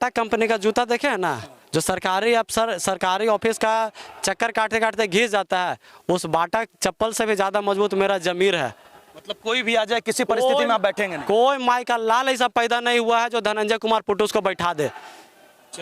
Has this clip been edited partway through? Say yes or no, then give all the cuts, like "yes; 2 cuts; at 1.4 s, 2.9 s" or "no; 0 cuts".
no; 0 cuts